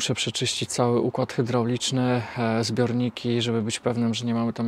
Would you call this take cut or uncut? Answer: uncut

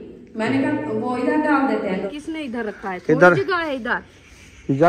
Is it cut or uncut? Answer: cut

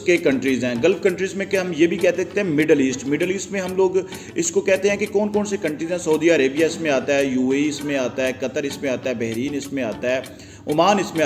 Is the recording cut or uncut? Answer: uncut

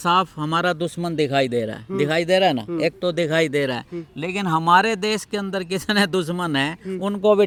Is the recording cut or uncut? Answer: uncut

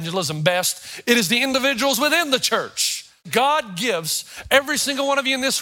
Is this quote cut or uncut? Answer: cut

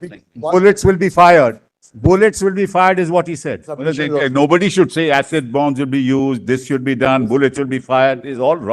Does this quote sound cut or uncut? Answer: cut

